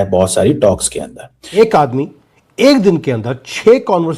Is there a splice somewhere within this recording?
yes; 1 cut; at 1.4 s

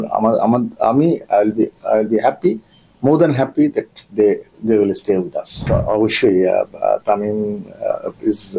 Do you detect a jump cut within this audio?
yes; 1 cut; at 5.6 s

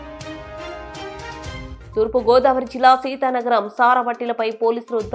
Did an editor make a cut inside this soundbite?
yes; 1 cut; at 1.8 s

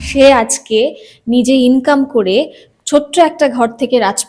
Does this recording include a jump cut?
no; 0 cuts

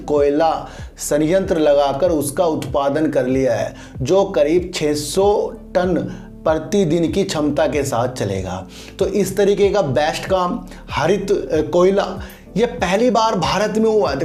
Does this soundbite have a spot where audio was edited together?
no; 0 cuts

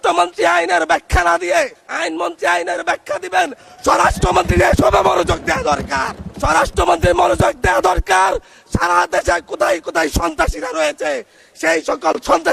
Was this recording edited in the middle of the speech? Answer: no; 0 cuts

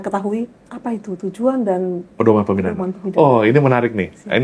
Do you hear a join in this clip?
yes; 1 cut; at 2.0 s

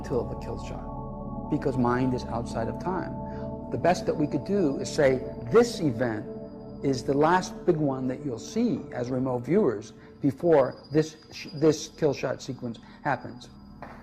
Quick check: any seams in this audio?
no; 0 cuts

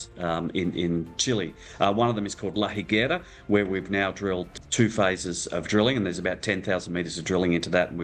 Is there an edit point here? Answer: yes; 1 cut; at 4.5 s

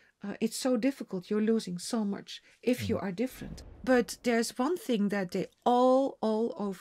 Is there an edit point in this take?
yes; 1 cut; at 3.5 s

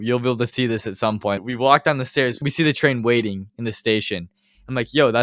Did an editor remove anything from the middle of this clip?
yes; 3 cuts; at 1.4 s, 2.5 s, 3.5 s

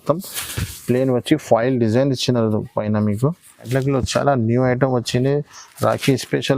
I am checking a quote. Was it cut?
yes; 1 cut; at 3.7 s

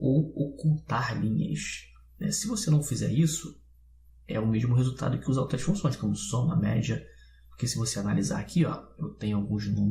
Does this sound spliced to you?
yes; 1 cut; at 7.6 s

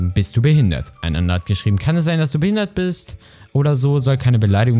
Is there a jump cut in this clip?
no; 0 cuts

